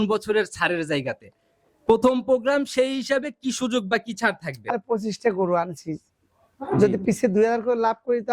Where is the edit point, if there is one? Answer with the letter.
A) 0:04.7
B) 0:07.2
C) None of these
A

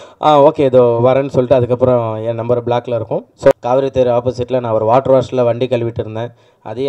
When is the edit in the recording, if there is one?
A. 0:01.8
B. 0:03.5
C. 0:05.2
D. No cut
B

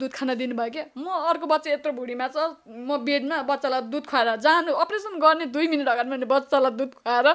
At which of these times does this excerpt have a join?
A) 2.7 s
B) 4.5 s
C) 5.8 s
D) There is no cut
D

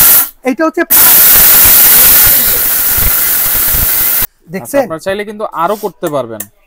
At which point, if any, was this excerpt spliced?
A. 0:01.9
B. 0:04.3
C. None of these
B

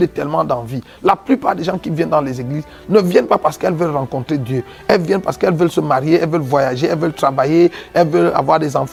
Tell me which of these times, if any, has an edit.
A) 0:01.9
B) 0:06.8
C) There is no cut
C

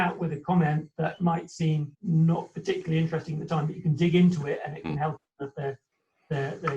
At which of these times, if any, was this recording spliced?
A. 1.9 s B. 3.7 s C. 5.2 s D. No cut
A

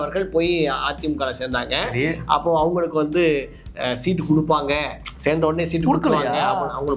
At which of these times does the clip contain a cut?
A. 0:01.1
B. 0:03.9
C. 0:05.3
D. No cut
D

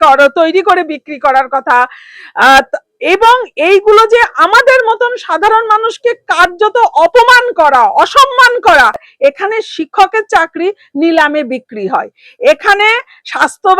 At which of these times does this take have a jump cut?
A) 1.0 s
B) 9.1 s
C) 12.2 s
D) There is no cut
B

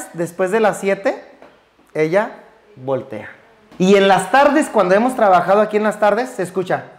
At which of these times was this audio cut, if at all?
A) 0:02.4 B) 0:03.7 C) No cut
B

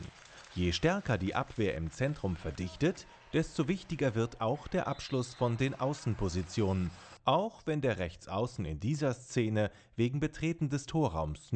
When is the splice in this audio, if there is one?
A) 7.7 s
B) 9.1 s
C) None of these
C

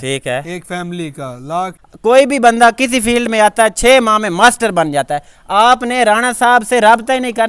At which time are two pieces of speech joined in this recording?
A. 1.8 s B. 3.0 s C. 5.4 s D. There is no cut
A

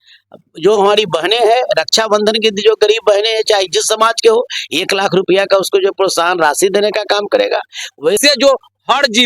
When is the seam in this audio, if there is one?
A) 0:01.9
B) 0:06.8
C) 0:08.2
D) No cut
C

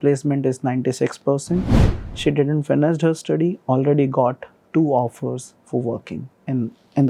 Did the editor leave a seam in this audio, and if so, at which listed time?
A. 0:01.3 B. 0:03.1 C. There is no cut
C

